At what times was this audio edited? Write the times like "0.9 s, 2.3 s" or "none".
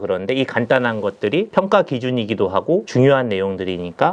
1.5 s, 2.9 s

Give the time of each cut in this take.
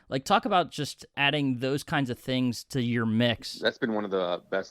1.2 s, 3.5 s

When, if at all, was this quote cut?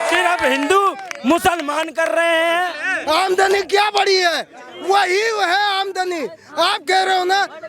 2.9 s

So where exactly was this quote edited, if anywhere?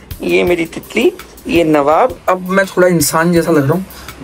2.2 s

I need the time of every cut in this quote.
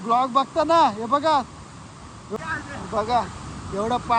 2.3 s

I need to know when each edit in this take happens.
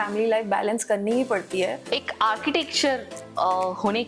1.8 s

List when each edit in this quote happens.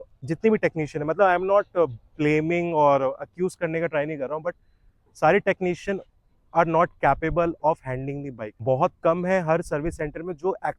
none

